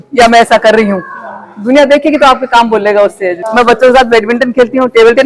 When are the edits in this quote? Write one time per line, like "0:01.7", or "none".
0:03.4